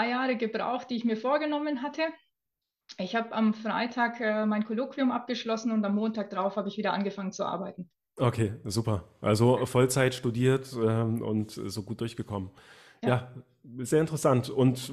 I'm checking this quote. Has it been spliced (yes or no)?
no